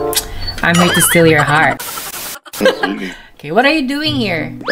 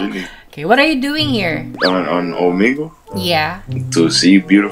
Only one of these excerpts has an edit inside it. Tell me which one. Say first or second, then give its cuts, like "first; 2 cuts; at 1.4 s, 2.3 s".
first; 1 cut; at 1.9 s